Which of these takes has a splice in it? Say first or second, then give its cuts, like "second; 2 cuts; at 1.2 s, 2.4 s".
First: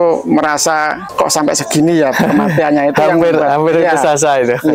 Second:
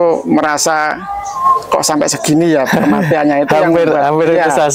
first; 1 cut; at 1.1 s